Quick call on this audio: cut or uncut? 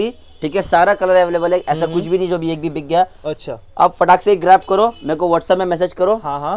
uncut